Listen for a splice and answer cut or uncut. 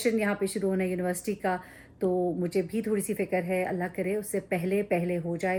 uncut